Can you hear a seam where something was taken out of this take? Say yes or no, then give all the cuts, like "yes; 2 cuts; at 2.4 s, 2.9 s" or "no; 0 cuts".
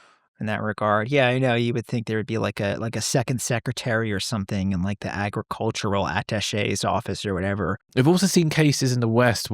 yes; 1 cut; at 7.9 s